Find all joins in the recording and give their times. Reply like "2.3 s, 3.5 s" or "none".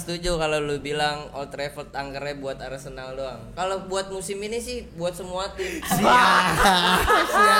3.4 s